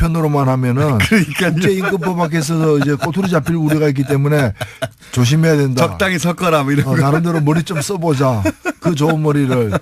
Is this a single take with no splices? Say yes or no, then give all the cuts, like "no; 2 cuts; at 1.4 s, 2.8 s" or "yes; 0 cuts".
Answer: yes; 0 cuts